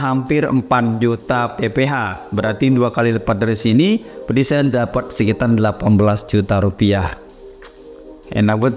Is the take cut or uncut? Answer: uncut